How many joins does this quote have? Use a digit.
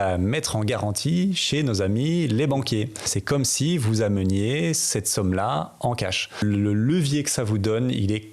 2